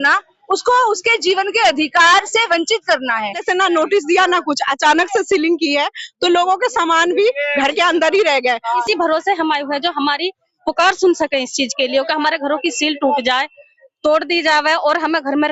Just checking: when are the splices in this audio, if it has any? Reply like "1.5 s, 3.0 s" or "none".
3.4 s, 8.7 s